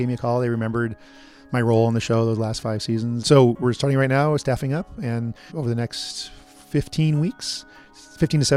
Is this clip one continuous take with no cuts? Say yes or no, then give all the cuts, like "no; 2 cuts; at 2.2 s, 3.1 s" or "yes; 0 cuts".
no; 2 cuts; at 3.2 s, 5.5 s